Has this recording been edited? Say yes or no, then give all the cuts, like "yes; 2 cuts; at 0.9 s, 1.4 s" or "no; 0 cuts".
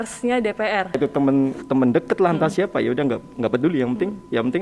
yes; 1 cut; at 1.0 s